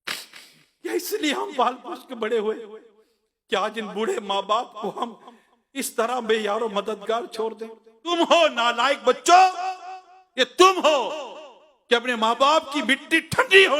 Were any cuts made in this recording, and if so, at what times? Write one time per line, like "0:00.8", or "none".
0:08.1